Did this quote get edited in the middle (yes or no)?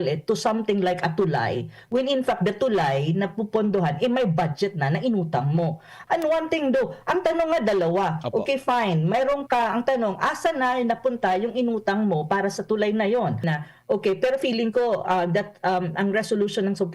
yes